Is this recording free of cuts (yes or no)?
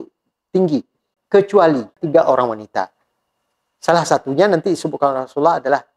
no